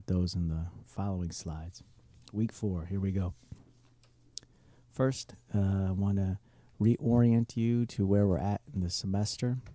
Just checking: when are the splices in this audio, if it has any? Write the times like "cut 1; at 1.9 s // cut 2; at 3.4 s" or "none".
cut 1; at 7.1 s